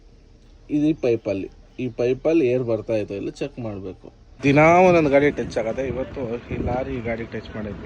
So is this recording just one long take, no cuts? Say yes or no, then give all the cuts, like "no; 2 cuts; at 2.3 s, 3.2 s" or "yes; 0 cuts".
no; 1 cut; at 4.4 s